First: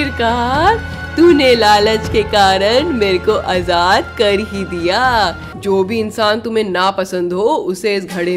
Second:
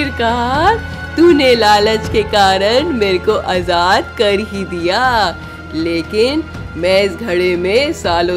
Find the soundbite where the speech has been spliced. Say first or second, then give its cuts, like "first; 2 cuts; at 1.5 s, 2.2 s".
first; 1 cut; at 5.5 s